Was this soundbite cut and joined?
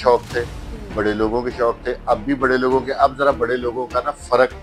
no; 0 cuts

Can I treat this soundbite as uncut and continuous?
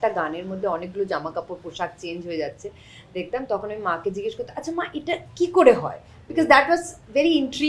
yes; 0 cuts

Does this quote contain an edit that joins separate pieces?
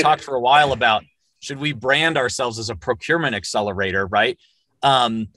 no; 0 cuts

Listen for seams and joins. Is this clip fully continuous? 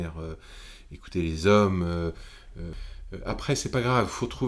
no; 1 cut; at 2.8 s

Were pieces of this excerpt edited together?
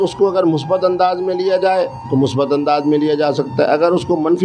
no; 0 cuts

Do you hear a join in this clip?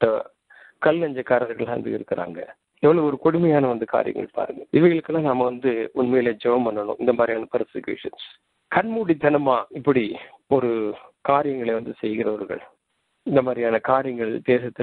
no; 0 cuts

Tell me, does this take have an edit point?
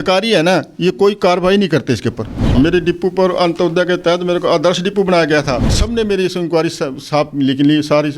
yes; 2 cuts; at 2.5 s, 5.8 s

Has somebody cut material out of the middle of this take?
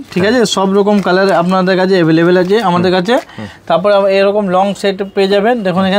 no; 0 cuts

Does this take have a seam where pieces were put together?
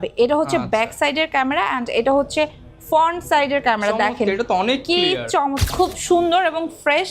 yes; 1 cut; at 5.6 s

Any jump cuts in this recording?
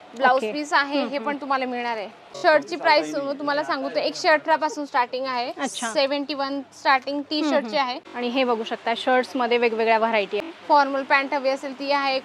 yes; 3 cuts; at 2.2 s, 8.0 s, 10.4 s

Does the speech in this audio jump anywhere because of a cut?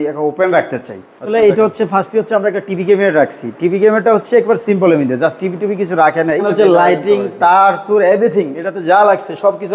yes; 2 cuts; at 1.3 s, 6.4 s

